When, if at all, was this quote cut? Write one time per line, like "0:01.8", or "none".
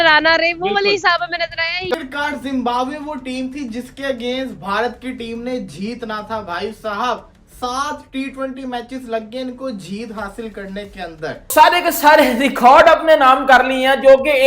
0:01.8
0:11.5